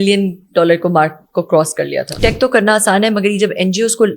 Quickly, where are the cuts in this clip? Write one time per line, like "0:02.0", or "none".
0:02.2